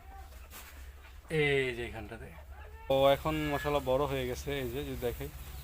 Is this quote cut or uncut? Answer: cut